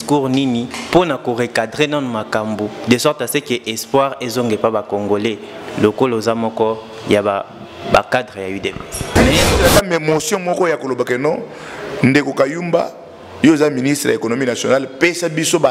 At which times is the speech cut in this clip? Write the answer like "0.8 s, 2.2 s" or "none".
9.0 s

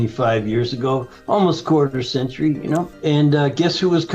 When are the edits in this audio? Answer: 2.9 s

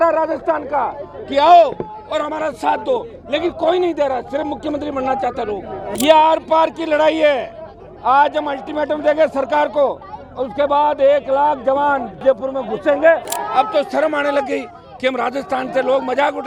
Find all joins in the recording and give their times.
5.9 s, 12.1 s, 13.3 s

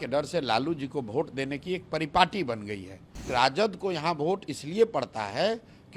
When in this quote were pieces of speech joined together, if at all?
3.3 s

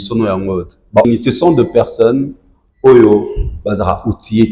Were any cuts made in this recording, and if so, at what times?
1.1 s

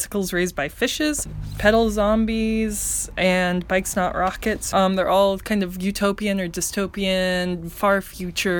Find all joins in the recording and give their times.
1.3 s, 4.6 s

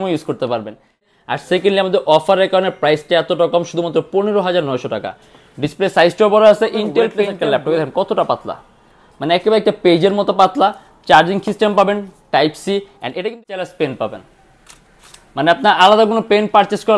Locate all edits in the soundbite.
1.1 s, 7.2 s, 13.3 s

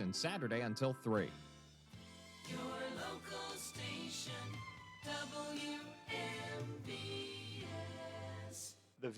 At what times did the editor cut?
1.5 s

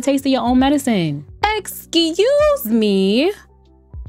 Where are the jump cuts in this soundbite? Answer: 1.2 s

